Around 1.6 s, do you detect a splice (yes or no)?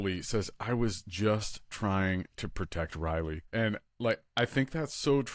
no